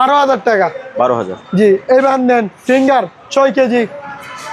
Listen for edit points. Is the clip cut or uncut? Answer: uncut